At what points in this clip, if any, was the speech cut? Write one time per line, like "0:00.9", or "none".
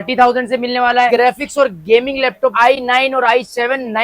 0:01.1
0:02.5